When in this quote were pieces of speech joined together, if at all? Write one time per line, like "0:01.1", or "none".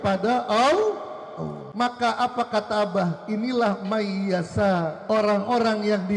0:01.6
0:05.0